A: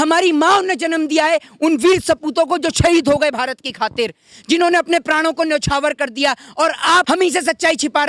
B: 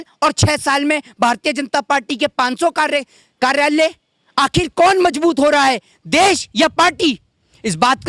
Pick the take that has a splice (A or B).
A